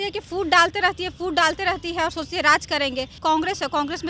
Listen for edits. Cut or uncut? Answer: cut